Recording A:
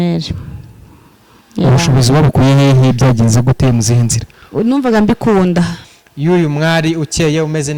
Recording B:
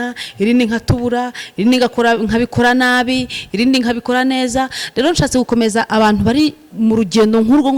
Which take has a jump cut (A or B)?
A